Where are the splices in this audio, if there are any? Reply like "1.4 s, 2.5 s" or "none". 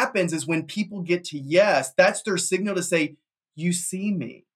none